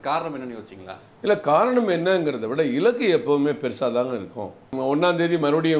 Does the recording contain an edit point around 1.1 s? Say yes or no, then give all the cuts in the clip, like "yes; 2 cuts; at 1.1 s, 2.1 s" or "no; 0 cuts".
no; 1 cut; at 4.7 s